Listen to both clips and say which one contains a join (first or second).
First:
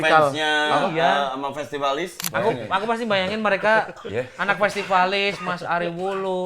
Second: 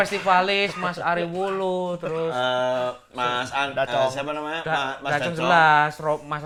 first